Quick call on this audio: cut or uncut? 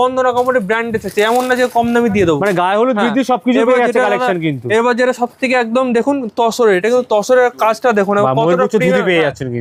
uncut